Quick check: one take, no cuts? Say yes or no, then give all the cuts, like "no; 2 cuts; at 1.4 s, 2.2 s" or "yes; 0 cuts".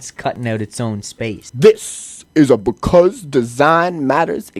no; 1 cut; at 1.5 s